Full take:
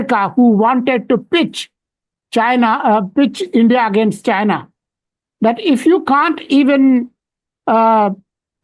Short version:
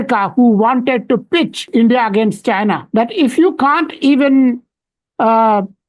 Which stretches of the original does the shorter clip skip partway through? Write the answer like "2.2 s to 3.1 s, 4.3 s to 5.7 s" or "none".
1.6 s to 3.4 s, 4.6 s to 5.3 s